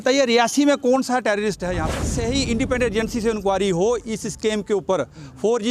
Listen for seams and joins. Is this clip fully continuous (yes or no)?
no